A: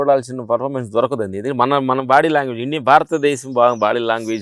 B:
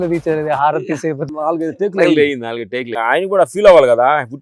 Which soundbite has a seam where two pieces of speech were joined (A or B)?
B